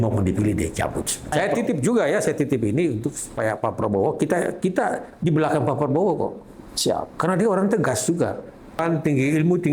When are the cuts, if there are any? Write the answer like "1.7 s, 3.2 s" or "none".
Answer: 1.3 s, 8.8 s